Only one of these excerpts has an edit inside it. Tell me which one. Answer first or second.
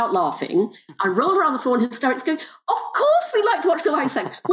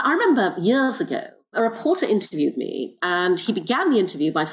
second